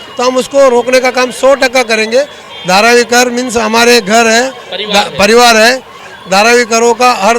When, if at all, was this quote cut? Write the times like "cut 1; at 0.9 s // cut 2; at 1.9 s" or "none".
cut 1; at 2.5 s // cut 2; at 6.0 s